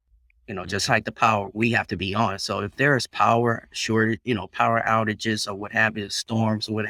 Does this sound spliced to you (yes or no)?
no